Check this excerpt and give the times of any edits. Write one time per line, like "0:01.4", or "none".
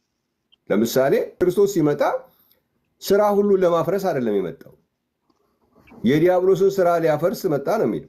0:01.3